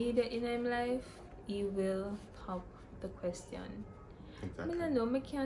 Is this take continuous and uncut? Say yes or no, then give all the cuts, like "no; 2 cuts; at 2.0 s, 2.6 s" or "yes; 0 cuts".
yes; 0 cuts